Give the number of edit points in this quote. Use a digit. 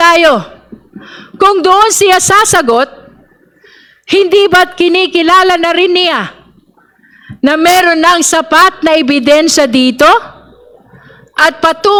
0